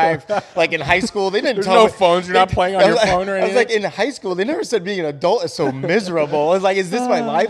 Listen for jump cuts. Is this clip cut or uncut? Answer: uncut